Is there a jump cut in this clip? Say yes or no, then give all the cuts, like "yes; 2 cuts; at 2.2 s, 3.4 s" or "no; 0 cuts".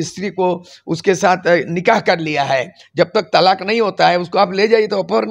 no; 0 cuts